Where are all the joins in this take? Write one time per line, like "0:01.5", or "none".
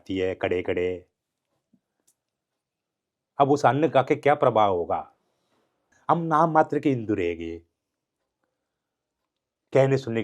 0:05.9